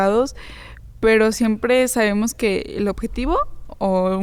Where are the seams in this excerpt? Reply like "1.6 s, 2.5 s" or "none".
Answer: none